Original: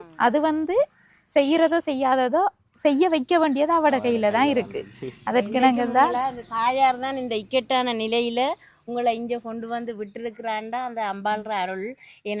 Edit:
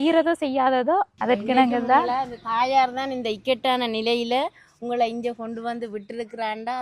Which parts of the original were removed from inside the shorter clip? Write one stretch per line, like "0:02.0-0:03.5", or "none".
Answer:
0:02.6-0:05.2